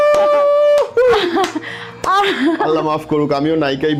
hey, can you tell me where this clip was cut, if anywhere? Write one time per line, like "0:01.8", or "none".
none